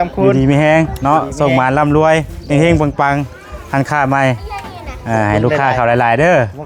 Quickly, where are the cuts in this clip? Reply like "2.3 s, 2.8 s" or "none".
none